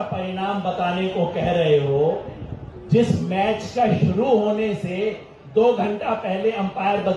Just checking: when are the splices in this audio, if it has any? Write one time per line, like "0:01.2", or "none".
none